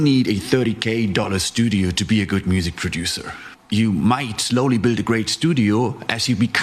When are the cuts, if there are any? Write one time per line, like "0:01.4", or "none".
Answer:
0:03.5

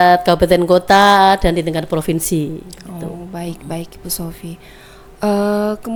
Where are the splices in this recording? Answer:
none

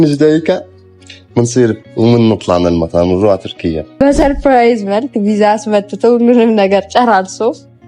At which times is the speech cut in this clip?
0:03.9

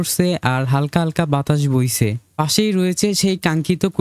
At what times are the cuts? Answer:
none

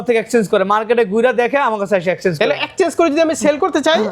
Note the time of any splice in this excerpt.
none

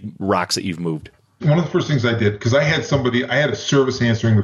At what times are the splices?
0:01.4

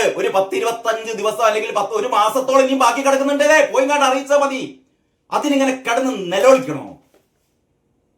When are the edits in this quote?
none

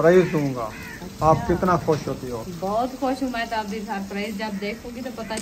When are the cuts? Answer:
none

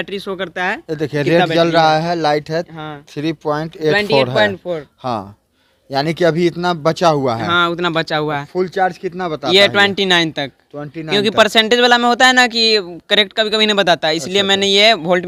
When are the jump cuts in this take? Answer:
none

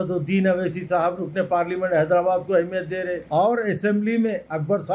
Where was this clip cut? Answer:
0:03.2

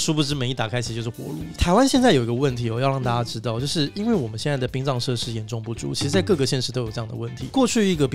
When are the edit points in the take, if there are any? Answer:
none

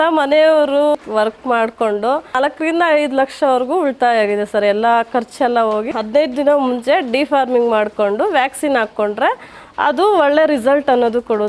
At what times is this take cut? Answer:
0:00.9
0:02.4
0:05.9

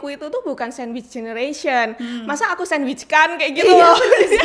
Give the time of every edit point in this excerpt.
none

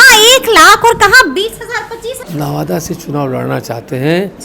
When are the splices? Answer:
0:02.2

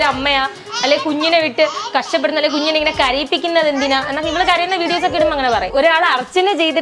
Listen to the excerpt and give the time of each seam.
0:05.7

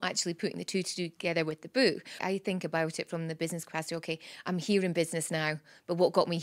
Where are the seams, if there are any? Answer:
0:02.1

